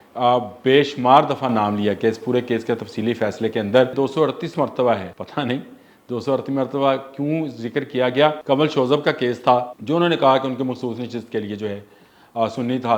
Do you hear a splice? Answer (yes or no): yes